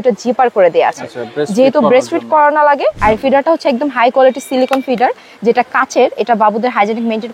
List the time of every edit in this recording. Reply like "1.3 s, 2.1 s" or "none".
3.0 s

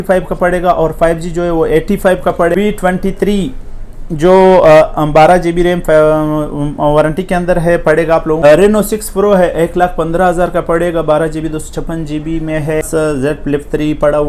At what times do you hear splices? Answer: 2.5 s, 8.4 s, 12.9 s

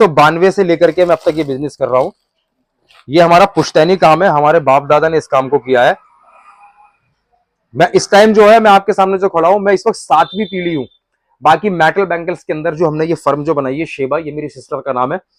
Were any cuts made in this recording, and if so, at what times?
none

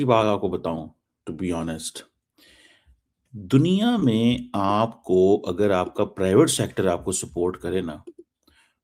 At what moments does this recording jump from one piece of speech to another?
none

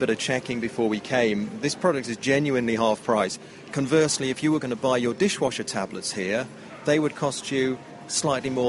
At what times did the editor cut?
none

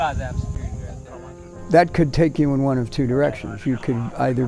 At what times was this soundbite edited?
none

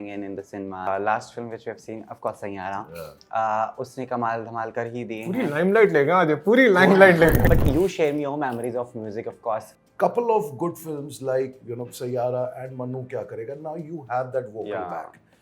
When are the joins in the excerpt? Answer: 0.9 s, 7.5 s, 9.8 s

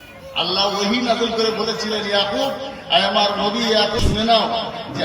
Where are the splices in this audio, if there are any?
4.0 s

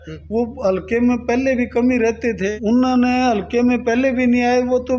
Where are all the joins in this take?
2.5 s

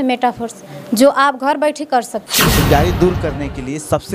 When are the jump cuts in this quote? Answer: 2.6 s

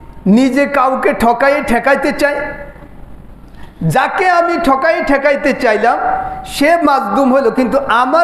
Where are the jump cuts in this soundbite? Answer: none

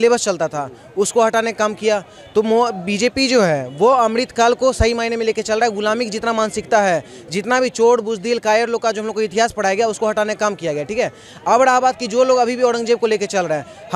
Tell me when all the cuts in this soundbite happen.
none

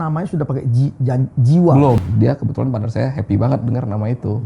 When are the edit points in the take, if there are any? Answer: 2.0 s

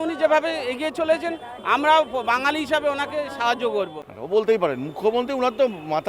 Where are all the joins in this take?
4.0 s

